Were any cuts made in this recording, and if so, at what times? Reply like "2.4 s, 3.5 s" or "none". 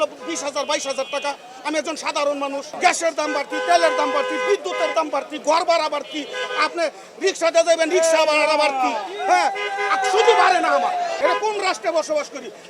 2.7 s, 11.2 s